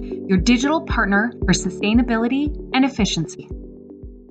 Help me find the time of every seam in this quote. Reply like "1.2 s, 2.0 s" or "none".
3.2 s